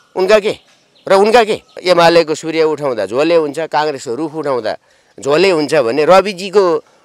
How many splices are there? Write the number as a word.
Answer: one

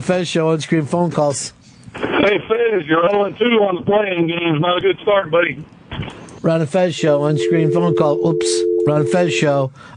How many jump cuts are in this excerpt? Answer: zero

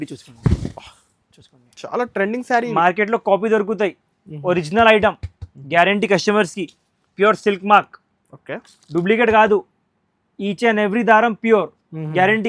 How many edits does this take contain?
zero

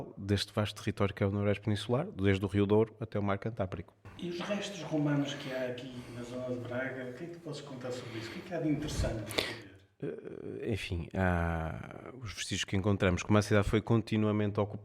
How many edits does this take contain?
zero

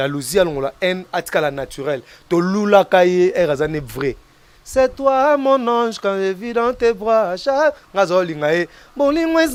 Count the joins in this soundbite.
zero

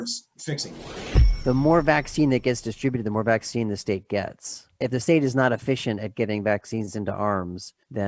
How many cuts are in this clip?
one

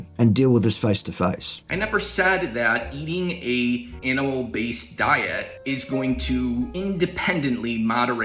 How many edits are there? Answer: four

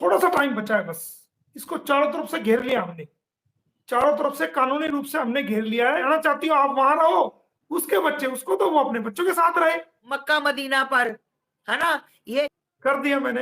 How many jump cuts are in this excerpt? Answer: three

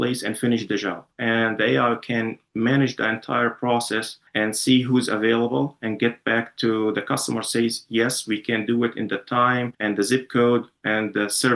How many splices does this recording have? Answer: two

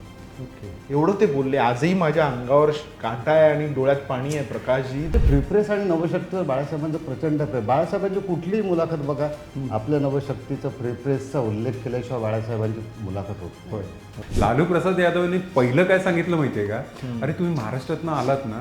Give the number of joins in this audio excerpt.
two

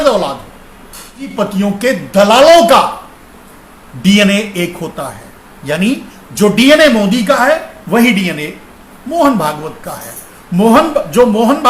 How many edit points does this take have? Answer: one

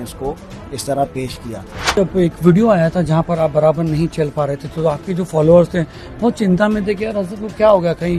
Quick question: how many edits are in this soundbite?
one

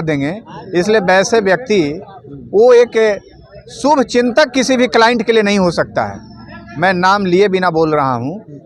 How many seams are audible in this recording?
zero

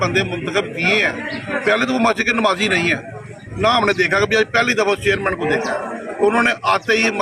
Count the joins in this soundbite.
zero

